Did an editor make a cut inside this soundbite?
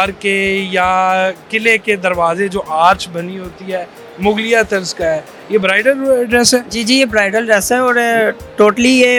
no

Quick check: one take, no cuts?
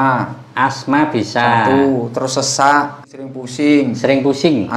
no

